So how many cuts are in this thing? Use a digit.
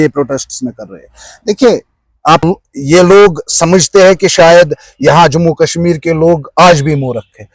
1